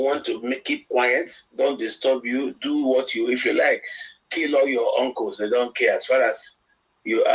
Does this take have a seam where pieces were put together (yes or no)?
no